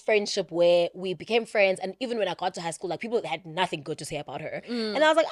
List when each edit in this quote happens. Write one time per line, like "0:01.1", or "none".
none